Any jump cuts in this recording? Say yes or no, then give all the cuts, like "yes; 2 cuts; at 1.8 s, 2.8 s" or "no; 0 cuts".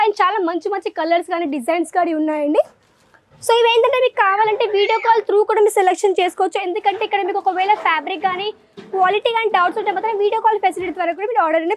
no; 0 cuts